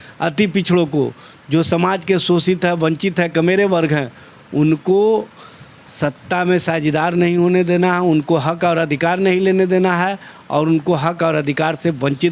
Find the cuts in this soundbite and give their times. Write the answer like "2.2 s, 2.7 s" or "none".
none